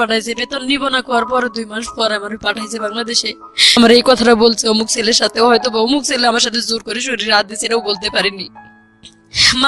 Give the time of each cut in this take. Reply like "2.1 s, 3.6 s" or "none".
3.8 s